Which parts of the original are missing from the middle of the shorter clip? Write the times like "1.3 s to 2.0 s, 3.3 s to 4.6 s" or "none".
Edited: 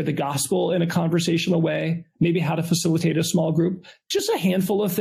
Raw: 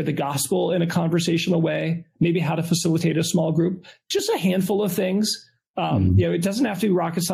none